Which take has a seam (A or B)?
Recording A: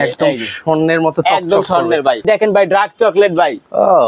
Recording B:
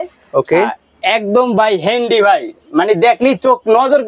A